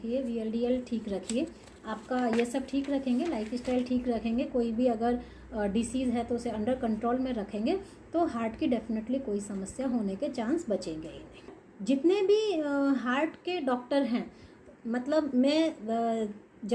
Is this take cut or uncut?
cut